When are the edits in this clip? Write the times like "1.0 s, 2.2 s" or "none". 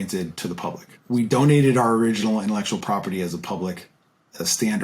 1.0 s